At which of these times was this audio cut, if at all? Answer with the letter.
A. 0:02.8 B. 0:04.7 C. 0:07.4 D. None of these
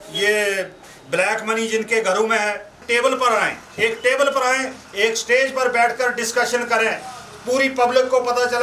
A